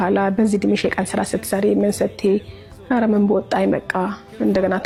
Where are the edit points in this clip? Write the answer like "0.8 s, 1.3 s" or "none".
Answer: none